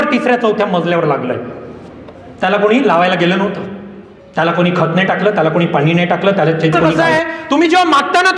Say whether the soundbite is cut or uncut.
cut